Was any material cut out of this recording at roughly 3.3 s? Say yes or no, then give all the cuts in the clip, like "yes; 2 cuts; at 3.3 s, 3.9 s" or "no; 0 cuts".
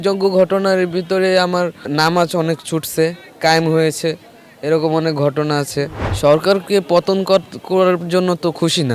no; 2 cuts; at 1.9 s, 6.0 s